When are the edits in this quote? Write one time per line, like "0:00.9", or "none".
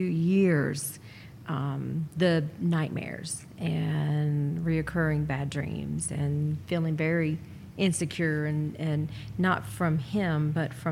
none